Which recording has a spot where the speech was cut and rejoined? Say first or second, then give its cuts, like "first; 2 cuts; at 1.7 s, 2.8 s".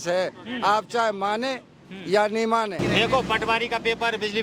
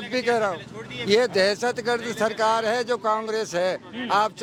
first; 1 cut; at 2.8 s